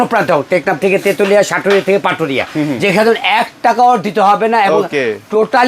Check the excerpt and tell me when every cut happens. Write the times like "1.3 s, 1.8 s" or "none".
none